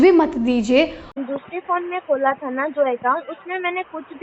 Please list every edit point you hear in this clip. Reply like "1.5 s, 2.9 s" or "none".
1.1 s

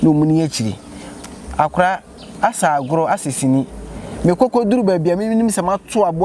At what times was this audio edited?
none

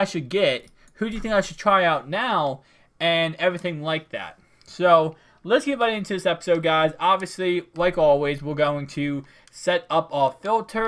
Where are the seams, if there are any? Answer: 4.4 s

